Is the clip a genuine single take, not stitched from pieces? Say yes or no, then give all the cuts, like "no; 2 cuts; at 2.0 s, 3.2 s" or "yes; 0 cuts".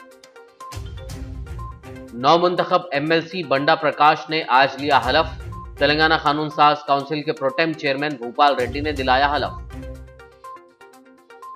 no; 1 cut; at 1.3 s